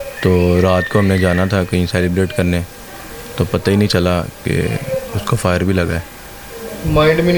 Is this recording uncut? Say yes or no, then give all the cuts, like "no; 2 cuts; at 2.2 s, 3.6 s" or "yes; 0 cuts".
yes; 0 cuts